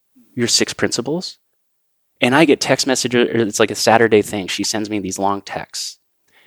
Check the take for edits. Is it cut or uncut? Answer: uncut